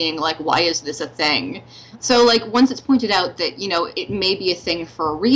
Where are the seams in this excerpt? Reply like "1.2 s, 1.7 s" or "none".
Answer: 2.1 s, 4.0 s